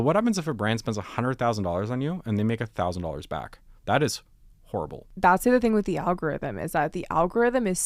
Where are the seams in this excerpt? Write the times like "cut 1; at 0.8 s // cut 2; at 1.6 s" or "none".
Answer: cut 1; at 5.1 s